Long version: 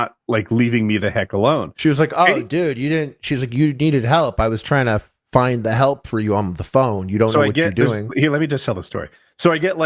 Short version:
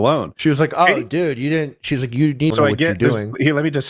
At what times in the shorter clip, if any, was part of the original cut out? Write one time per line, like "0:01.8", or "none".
0:02.5